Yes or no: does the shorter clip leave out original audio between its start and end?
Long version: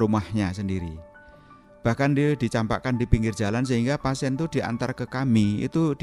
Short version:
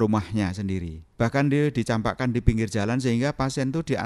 yes